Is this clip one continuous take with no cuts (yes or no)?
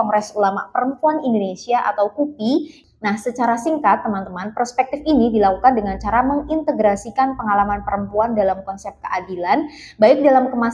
no